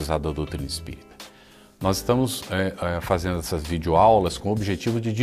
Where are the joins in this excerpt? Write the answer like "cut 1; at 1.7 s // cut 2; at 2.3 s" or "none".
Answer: cut 1; at 2.0 s